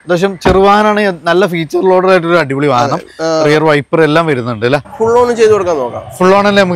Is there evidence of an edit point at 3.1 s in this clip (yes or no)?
no